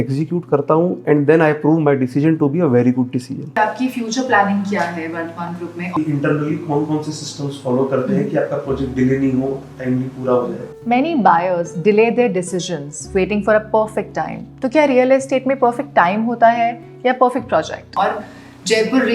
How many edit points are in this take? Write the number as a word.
four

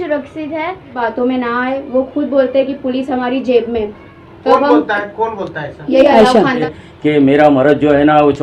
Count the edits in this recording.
two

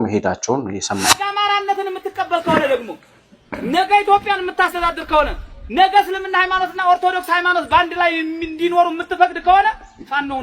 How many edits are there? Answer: one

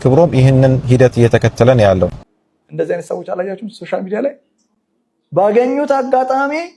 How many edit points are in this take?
one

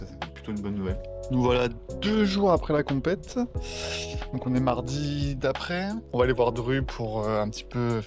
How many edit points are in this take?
zero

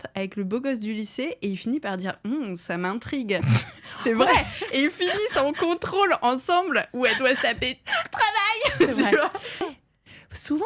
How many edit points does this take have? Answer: one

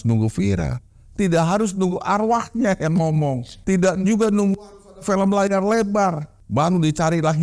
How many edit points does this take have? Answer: two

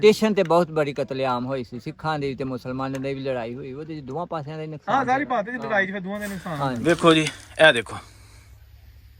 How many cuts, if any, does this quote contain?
one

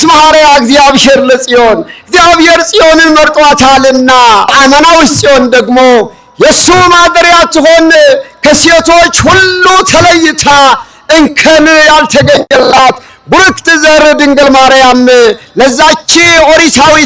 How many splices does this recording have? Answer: one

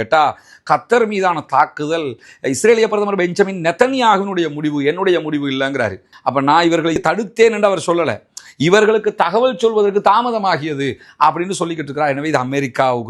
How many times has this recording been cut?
one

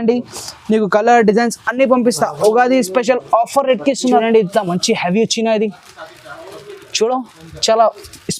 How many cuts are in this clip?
one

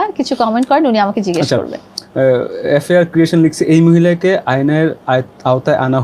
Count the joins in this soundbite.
zero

